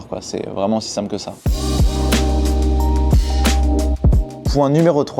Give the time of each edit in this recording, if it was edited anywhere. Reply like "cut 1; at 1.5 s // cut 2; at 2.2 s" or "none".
none

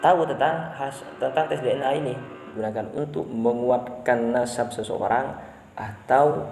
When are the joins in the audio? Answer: cut 1; at 2.5 s

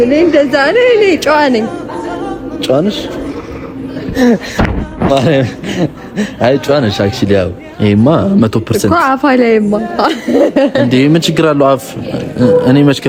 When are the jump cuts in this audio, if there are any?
none

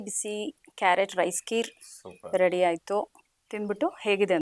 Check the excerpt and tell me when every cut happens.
none

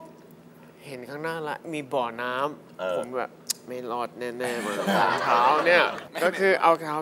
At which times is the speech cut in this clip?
cut 1; at 6.1 s

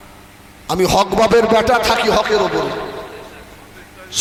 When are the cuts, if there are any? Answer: none

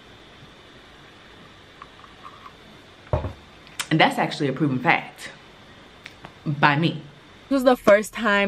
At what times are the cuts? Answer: cut 1; at 7.5 s

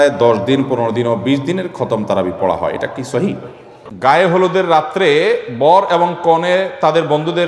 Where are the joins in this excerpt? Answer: cut 1; at 3.9 s

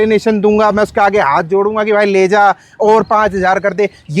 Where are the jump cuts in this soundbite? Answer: none

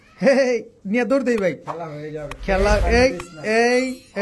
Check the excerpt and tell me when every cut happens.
none

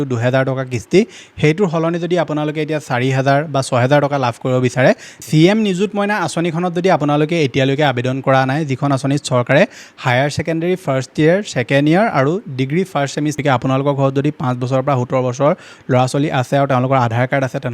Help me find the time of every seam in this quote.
cut 1; at 5.1 s // cut 2; at 13.4 s

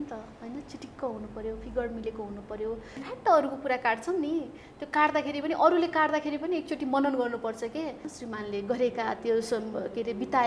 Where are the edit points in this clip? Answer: cut 1; at 3.0 s // cut 2; at 8.1 s

